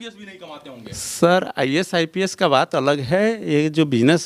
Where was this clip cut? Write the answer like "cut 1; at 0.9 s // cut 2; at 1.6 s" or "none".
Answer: none